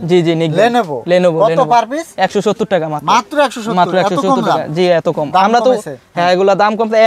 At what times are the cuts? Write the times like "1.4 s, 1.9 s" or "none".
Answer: none